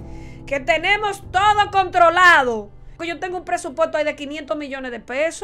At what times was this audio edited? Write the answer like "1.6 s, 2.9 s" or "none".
3.0 s